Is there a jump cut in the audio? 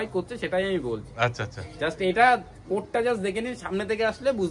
no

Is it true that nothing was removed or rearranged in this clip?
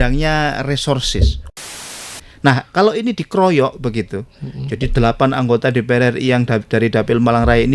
no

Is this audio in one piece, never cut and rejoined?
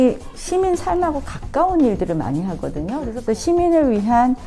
no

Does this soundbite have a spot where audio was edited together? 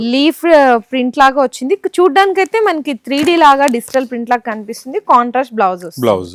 no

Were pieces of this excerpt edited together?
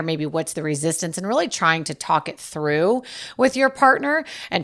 no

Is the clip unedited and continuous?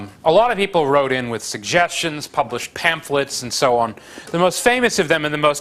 yes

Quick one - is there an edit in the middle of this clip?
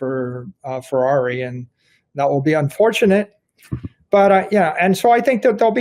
no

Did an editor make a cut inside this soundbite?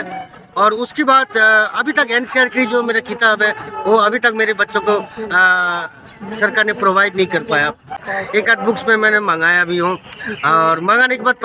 yes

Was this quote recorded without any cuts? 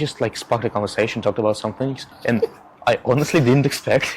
no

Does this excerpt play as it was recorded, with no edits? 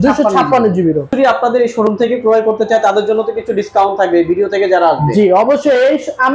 no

